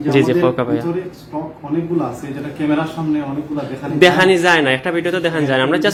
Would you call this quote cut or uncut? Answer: uncut